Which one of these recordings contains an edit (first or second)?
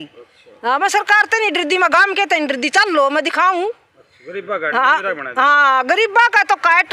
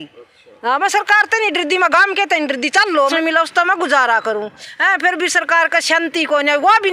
second